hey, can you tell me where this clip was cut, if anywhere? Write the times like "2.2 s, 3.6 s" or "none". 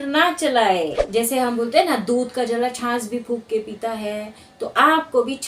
1.0 s